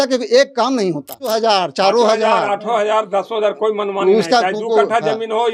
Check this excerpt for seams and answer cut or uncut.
cut